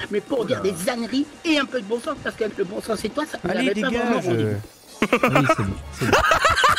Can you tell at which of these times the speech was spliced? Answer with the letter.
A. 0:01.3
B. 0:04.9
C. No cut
C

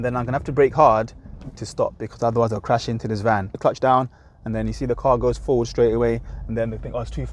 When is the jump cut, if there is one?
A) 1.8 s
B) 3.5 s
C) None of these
B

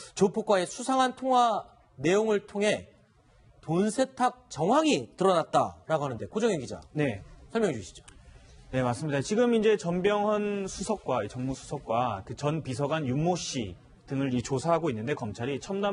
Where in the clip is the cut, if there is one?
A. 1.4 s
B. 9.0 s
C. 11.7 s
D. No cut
D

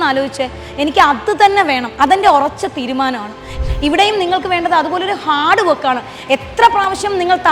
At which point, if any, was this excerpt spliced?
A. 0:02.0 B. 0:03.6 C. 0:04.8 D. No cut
B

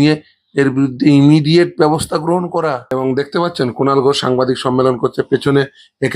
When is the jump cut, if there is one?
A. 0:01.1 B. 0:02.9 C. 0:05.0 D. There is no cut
B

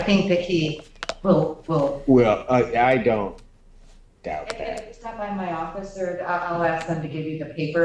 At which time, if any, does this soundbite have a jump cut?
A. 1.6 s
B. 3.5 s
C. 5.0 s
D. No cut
D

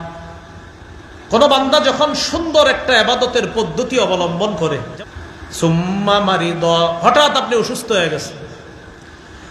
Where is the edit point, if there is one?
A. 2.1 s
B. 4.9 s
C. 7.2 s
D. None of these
B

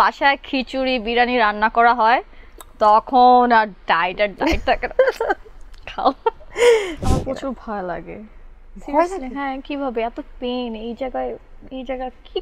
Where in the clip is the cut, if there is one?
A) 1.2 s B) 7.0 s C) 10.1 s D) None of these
B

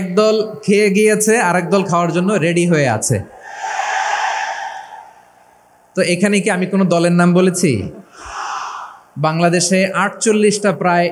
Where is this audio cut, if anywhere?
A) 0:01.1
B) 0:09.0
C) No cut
C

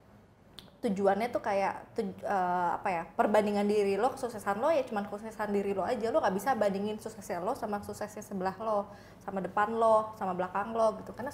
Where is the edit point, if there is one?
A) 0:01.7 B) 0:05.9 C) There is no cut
C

